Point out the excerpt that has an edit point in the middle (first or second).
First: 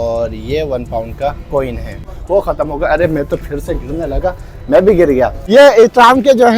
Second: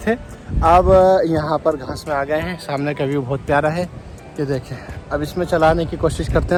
first